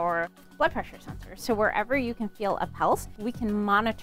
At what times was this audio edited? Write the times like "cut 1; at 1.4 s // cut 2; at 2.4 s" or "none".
cut 1; at 3.1 s